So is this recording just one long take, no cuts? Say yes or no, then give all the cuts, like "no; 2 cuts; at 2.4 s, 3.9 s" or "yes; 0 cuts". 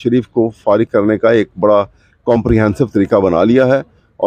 yes; 0 cuts